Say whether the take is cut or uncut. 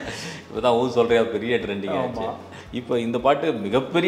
cut